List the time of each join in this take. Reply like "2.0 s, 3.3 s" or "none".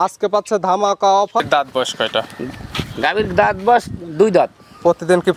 1.4 s